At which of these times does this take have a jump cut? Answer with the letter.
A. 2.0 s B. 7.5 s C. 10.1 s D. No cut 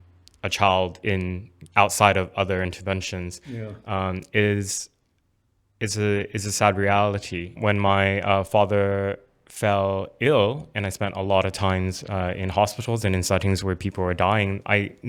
B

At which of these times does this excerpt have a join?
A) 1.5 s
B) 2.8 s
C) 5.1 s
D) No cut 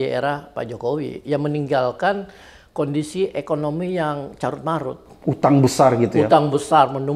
D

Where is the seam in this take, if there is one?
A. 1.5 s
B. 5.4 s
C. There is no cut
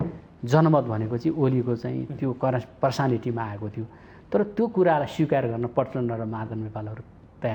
C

